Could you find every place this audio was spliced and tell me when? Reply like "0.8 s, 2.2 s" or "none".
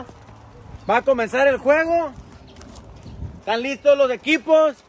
none